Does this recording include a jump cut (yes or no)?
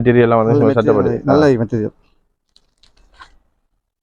yes